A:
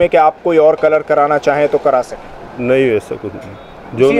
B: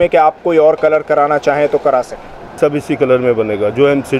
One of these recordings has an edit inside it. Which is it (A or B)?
B